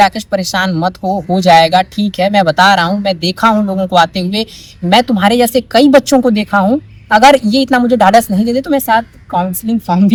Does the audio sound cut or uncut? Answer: uncut